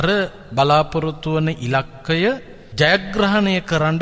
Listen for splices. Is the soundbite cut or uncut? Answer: cut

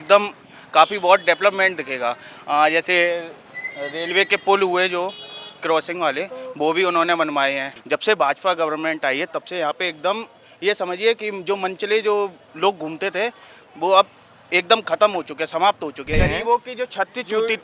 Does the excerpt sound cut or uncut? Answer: cut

